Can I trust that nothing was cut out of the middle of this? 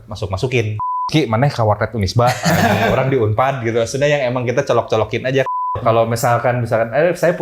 no; 2 cuts; at 0.8 s, 5.8 s

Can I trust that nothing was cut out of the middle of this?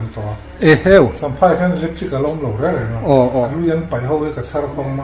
no; 1 cut; at 3.5 s

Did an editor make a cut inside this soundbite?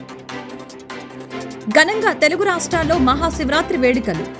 no; 0 cuts

